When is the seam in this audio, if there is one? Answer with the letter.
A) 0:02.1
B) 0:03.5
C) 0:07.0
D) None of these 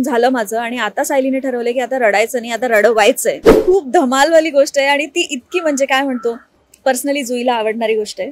B